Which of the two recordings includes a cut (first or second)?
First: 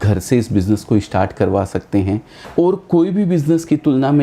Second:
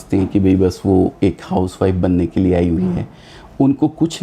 first